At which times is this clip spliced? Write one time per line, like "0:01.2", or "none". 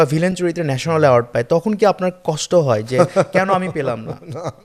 none